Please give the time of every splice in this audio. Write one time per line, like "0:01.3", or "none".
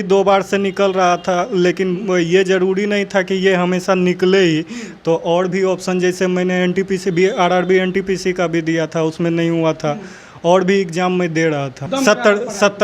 0:11.7